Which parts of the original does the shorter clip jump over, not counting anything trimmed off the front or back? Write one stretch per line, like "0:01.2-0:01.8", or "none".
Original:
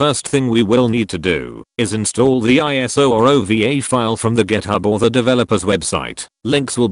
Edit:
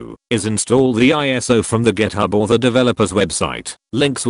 0:03.0-0:04.0